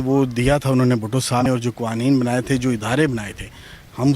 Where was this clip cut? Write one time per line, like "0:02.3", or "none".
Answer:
0:01.5